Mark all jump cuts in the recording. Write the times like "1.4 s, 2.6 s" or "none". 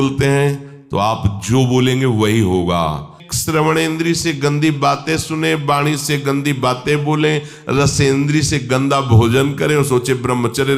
3.2 s